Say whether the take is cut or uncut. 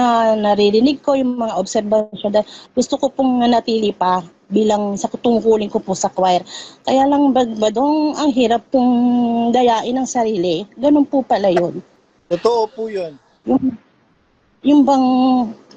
uncut